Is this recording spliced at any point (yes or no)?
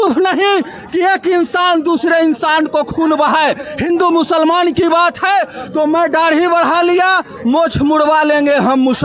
no